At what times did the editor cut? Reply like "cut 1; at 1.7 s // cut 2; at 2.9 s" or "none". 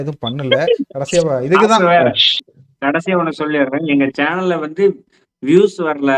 cut 1; at 2.6 s